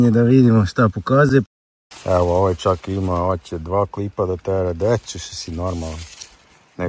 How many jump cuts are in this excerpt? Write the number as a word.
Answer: one